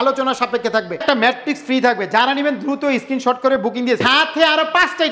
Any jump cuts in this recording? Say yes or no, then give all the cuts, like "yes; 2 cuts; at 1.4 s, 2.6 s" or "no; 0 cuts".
yes; 2 cuts; at 1.0 s, 4.1 s